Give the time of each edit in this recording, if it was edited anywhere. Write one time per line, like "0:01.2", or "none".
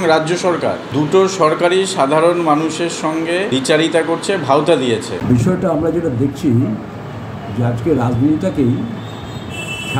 0:00.8
0:03.5
0:05.1